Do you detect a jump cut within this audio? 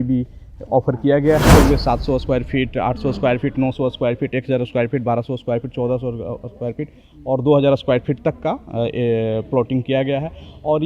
yes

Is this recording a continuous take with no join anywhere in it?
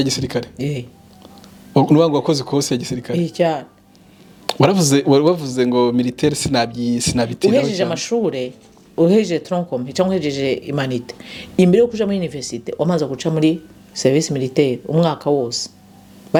yes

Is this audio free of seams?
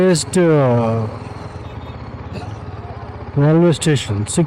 yes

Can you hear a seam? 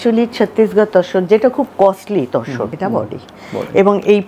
yes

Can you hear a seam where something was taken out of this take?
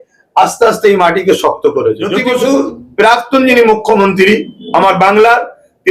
yes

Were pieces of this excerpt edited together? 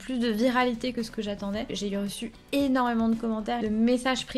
yes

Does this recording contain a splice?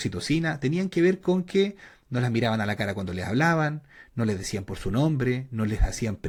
no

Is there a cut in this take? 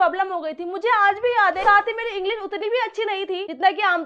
yes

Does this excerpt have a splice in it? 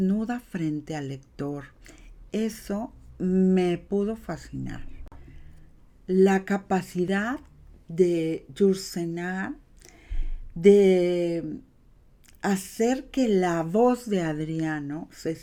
no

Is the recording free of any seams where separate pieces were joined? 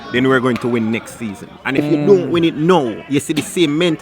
no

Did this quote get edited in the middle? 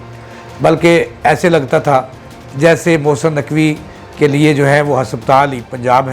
no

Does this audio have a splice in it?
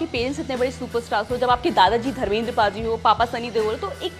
no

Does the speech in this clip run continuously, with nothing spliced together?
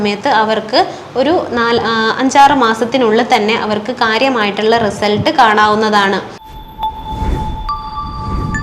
no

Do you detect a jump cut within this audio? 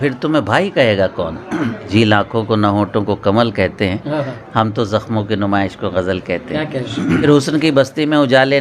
yes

